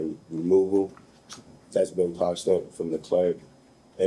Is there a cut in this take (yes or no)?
no